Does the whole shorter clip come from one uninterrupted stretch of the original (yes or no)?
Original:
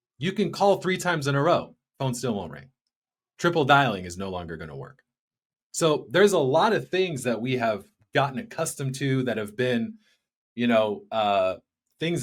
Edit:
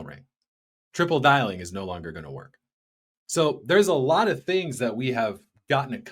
yes